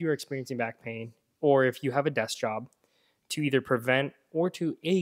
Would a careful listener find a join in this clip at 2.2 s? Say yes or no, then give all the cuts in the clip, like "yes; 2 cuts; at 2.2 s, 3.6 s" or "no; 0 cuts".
no; 0 cuts